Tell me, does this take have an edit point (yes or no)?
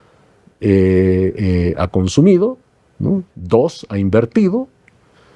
no